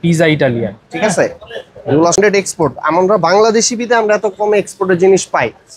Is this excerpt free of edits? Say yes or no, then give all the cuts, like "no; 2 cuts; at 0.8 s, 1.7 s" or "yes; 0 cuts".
no; 1 cut; at 2.2 s